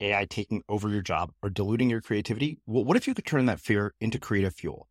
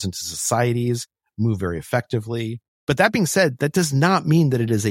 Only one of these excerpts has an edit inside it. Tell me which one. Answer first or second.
second